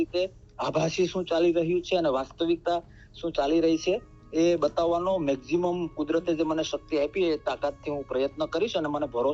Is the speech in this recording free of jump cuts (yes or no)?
yes